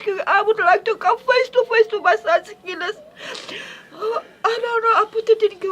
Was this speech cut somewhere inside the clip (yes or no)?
yes